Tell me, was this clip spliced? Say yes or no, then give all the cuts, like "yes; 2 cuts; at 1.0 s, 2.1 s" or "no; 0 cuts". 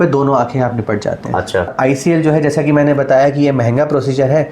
yes; 1 cut; at 1.7 s